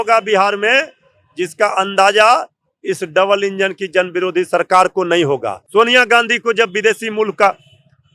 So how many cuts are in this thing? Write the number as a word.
one